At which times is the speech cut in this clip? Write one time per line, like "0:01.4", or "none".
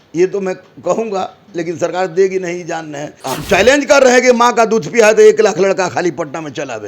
0:03.1

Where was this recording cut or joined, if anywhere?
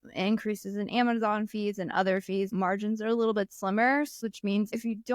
0:02.5
0:04.3

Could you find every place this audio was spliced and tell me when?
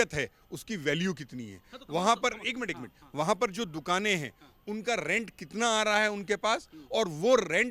none

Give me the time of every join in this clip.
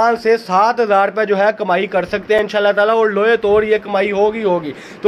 none

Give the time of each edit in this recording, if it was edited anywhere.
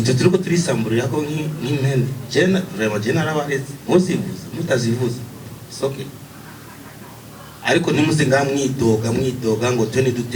none

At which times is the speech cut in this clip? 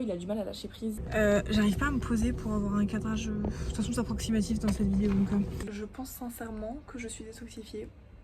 0:01.0
0:05.6

